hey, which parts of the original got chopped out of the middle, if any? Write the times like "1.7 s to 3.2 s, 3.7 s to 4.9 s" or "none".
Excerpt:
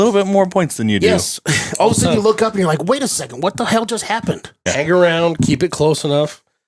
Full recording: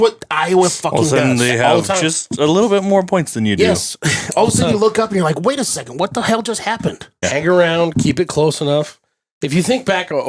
none